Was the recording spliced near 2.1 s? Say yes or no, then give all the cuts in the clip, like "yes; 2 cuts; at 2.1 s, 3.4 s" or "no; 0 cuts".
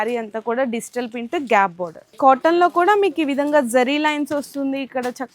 yes; 1 cut; at 2.1 s